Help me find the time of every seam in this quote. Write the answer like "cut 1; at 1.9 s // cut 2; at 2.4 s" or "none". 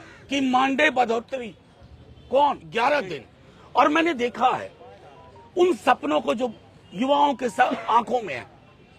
cut 1; at 2.7 s